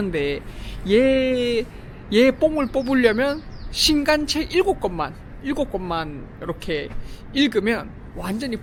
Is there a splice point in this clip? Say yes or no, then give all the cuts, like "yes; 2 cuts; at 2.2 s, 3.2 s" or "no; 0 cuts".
no; 0 cuts